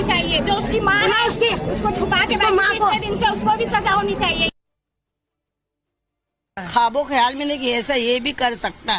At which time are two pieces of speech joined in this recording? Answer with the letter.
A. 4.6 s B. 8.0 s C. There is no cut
B